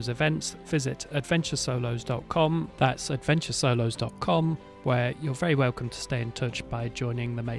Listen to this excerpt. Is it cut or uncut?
uncut